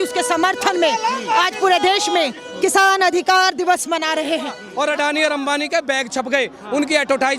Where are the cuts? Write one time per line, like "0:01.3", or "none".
0:04.6